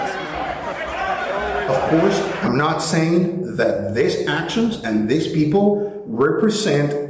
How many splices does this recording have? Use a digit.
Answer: 1